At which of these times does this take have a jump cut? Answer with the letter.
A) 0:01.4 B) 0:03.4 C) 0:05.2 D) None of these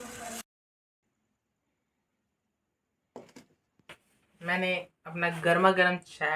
D